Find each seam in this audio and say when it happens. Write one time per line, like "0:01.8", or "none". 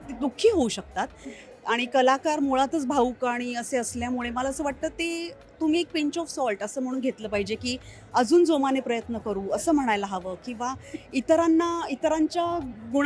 none